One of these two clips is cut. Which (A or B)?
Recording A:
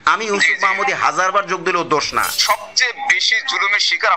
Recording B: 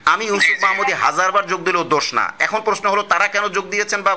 A